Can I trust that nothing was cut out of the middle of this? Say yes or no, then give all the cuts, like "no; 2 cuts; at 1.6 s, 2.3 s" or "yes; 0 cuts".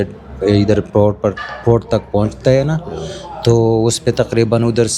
yes; 0 cuts